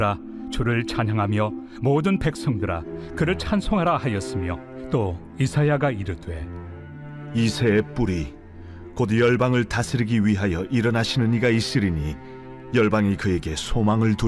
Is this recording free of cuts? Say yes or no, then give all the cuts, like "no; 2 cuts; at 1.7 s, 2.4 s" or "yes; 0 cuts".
no; 1 cut; at 4.6 s